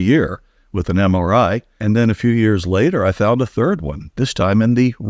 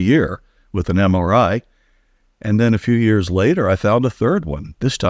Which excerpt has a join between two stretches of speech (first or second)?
first